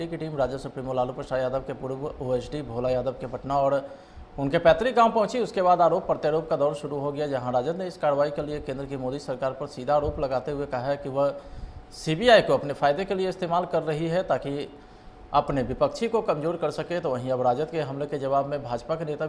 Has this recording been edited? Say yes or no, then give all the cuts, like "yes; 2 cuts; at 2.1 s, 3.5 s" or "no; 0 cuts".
no; 0 cuts